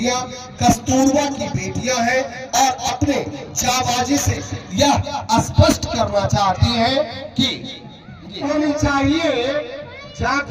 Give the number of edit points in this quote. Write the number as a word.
one